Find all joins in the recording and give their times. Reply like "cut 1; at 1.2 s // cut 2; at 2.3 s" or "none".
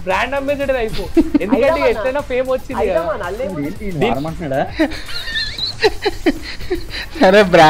none